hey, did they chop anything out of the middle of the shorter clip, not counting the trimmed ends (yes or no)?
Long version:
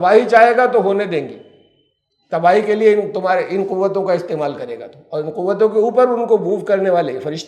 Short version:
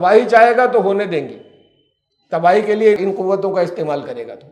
yes